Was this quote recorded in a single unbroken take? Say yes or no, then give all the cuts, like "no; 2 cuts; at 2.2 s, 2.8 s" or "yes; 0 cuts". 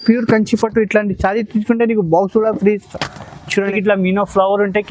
no; 1 cut; at 3.7 s